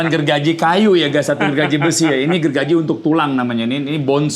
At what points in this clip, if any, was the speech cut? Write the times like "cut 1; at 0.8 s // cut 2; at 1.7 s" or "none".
none